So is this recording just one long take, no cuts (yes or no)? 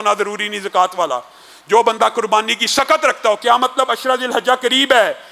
yes